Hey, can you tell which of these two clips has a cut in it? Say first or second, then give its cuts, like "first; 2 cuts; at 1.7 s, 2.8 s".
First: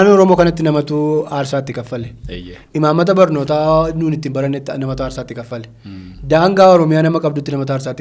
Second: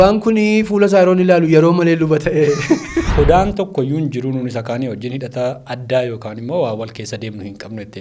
second; 1 cut; at 3.1 s